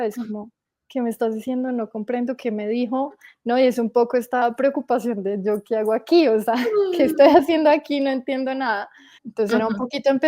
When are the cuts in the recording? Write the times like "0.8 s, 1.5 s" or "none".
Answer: 4.4 s, 9.2 s